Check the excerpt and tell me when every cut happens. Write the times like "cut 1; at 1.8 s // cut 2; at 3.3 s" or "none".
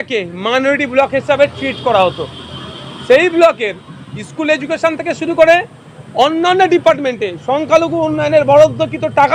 none